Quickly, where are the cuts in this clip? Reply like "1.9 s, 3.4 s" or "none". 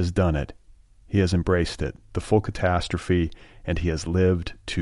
none